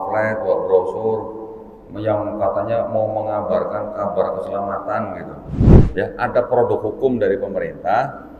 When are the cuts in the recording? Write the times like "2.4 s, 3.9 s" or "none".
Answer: 5.9 s